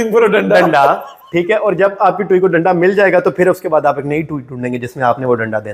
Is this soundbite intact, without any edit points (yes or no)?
yes